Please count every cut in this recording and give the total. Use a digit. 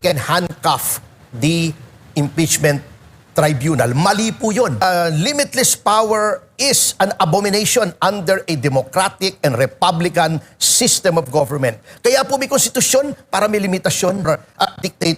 2